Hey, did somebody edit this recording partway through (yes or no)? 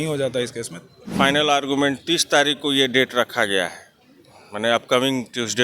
yes